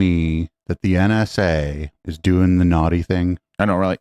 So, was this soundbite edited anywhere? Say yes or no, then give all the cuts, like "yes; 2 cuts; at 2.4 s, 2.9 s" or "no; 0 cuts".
no; 0 cuts